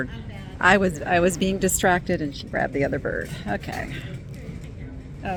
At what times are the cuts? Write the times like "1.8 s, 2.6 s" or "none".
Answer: none